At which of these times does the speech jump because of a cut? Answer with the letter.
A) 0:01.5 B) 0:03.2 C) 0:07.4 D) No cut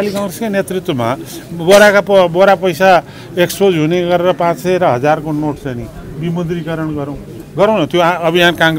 C